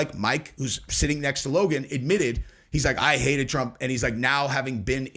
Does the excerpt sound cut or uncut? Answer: uncut